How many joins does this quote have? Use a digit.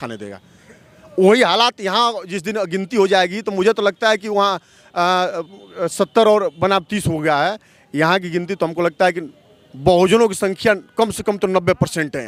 0